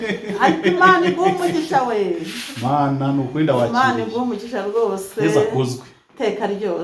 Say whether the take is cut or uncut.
uncut